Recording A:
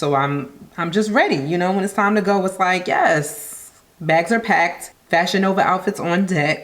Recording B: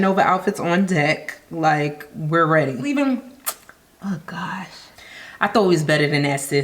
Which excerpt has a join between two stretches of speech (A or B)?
B